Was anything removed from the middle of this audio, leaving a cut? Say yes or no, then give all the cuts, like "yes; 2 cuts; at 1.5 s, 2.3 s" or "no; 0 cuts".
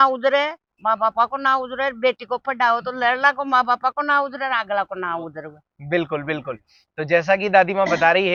no; 0 cuts